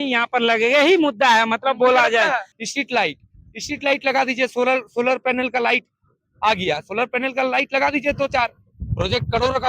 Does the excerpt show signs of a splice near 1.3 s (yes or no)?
no